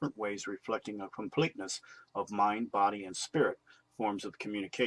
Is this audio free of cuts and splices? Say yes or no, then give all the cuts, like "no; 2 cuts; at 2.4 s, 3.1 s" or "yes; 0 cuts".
no; 1 cut; at 2.5 s